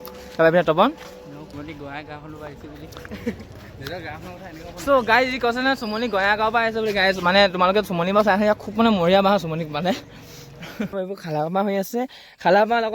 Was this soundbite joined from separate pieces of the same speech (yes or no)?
yes